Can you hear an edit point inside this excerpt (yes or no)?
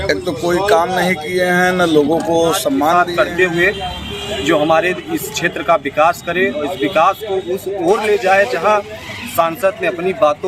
yes